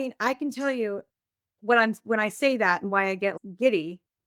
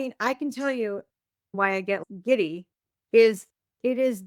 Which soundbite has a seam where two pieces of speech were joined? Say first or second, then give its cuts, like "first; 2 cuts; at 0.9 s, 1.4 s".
second; 1 cut; at 1.5 s